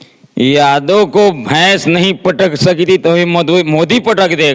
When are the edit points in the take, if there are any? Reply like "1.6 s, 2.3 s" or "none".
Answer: none